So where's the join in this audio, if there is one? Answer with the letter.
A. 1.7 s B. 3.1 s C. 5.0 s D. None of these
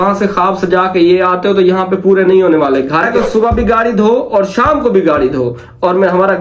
B